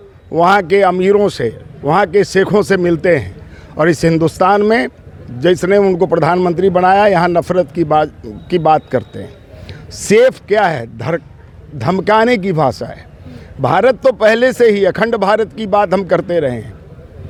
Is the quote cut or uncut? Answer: uncut